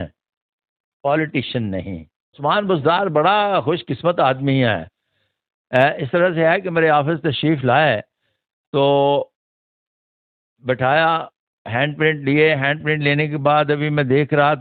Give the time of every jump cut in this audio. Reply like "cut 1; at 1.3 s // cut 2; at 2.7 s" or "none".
cut 1; at 2.4 s